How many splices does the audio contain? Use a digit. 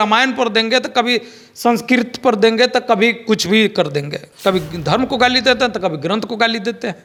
0